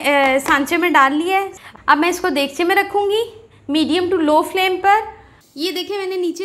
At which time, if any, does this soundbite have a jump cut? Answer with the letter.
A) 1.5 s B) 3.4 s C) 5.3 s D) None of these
A